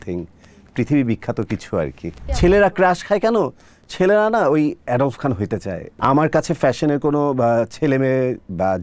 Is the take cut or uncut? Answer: cut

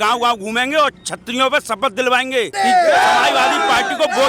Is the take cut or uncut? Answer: cut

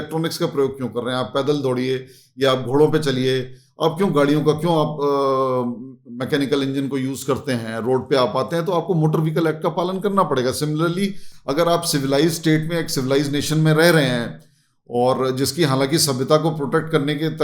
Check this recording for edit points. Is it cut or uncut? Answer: uncut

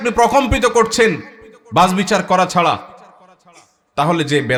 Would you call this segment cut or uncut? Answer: uncut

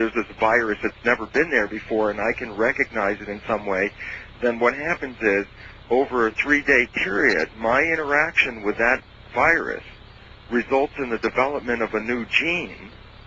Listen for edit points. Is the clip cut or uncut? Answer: cut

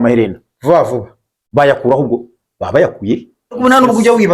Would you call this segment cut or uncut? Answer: cut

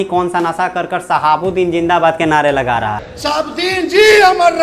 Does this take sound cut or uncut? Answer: cut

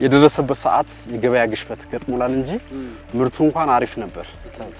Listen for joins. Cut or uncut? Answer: uncut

